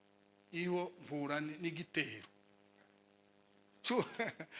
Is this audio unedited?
yes; 0 cuts

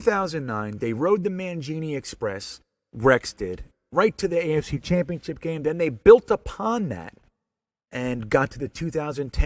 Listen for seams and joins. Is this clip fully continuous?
yes; 0 cuts

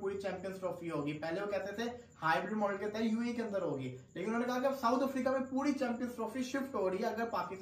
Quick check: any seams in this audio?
no; 0 cuts

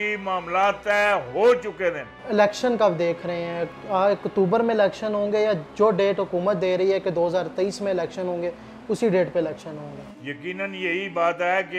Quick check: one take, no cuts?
yes; 0 cuts

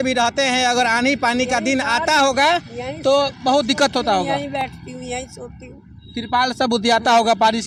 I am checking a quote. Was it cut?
no; 0 cuts

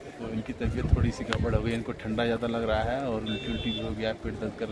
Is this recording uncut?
yes; 0 cuts

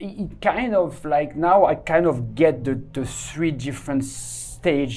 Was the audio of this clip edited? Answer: no; 0 cuts

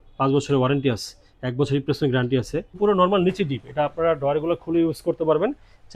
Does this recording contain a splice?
yes; 1 cut; at 2.8 s

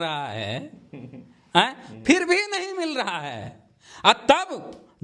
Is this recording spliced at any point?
no; 0 cuts

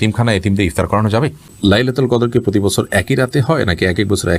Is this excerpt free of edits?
no; 1 cut; at 1.5 s

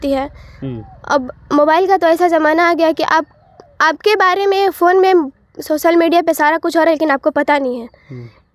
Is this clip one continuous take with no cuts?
yes; 0 cuts

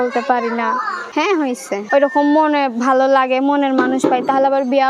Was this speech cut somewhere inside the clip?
yes; 2 cuts; at 1.0 s, 1.8 s

